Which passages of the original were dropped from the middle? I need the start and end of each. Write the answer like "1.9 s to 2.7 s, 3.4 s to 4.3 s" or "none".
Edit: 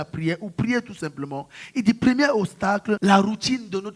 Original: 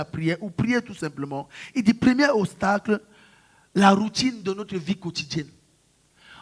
3.0 s to 3.7 s